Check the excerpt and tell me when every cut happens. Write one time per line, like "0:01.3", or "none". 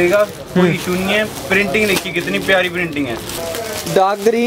0:03.4